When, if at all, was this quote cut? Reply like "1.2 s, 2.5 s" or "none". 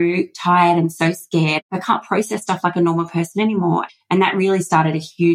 1.6 s, 3.9 s